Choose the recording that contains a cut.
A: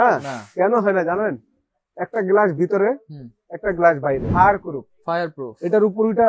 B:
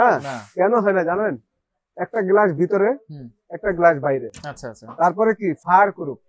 A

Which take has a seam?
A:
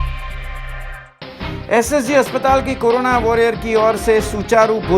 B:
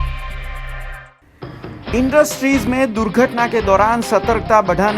A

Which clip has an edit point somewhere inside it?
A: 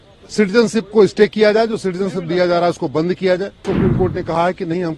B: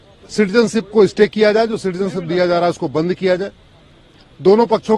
A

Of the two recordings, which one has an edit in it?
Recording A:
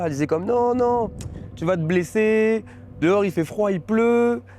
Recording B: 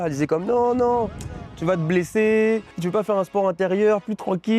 B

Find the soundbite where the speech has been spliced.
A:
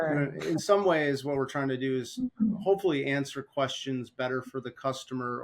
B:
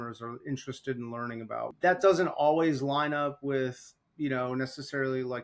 B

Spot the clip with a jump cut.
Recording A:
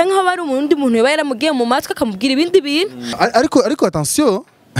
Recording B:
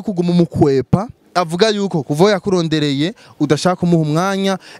A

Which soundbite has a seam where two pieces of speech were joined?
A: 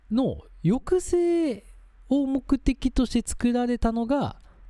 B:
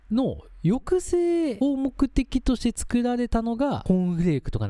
B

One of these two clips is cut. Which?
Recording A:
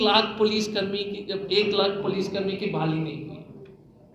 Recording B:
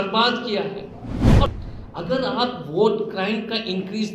B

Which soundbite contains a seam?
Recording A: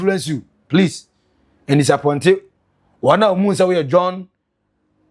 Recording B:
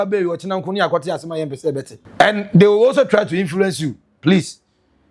B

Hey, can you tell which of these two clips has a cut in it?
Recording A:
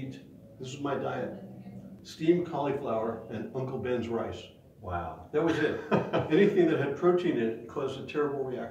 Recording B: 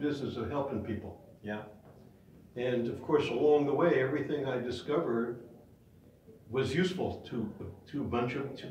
A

